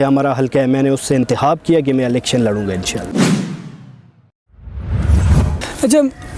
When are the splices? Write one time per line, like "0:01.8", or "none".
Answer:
none